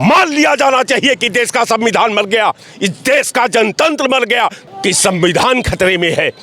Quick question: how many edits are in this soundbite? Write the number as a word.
one